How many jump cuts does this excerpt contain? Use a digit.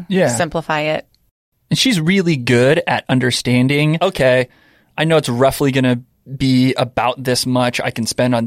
1